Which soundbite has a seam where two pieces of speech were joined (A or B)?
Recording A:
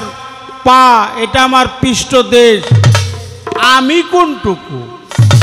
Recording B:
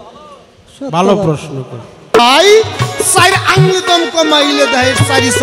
B